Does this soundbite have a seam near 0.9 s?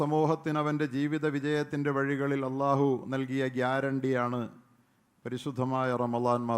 no; 0 cuts

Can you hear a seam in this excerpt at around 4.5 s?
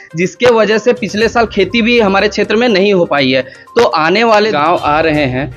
yes; 1 cut; at 4.5 s

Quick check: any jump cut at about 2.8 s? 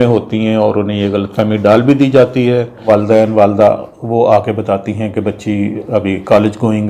yes; 1 cut; at 2.8 s

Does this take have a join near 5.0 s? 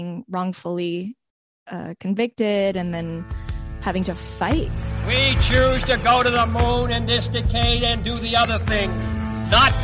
yes; 1 cut; at 5.0 s

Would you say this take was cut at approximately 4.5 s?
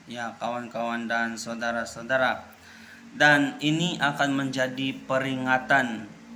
no; 0 cuts

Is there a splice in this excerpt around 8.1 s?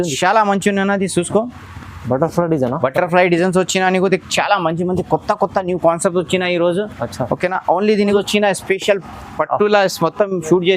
yes; 1 cut; at 8.1 s

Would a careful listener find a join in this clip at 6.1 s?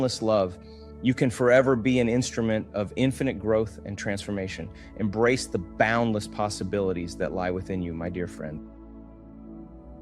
no; 1 cut; at 9.1 s

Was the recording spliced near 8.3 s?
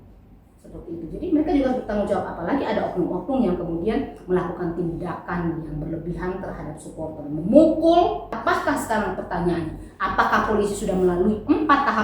yes; 1 cut; at 8.3 s

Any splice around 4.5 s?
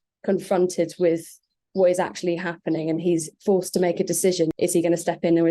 yes; 1 cut; at 4.5 s

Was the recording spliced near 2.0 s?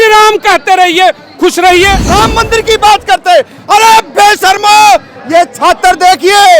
yes; 1 cut; at 2.0 s

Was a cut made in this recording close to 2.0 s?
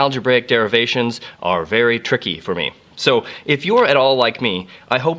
yes; 1 cut; at 2.0 s

